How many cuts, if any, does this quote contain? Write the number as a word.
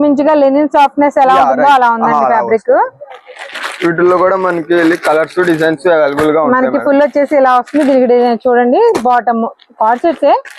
zero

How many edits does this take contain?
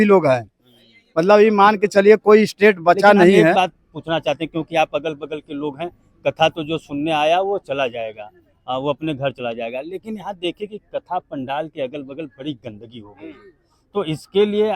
one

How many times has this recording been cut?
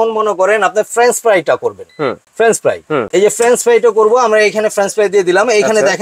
two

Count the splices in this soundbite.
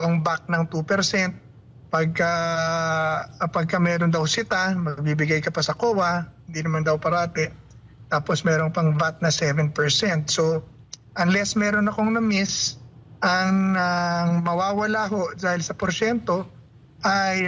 zero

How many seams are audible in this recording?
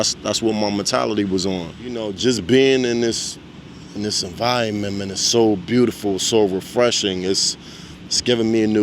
one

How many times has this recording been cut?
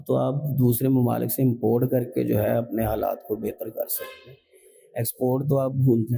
zero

